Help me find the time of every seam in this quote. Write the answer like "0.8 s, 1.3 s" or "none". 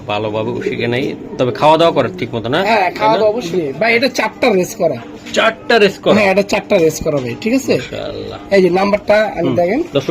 3.5 s